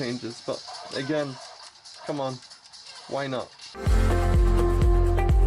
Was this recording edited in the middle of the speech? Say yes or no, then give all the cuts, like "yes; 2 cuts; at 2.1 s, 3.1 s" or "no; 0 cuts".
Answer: yes; 1 cut; at 3.8 s